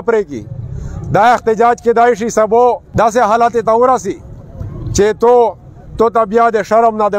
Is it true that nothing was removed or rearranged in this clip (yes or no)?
no